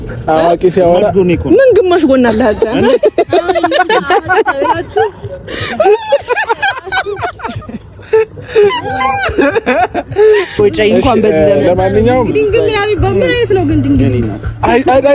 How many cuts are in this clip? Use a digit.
1